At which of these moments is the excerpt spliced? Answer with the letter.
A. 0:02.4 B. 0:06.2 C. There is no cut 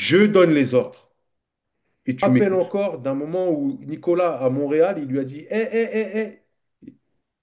A